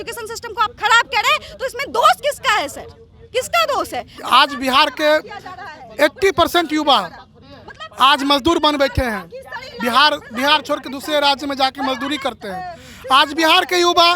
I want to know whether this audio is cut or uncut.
cut